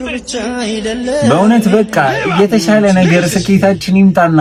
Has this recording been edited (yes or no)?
no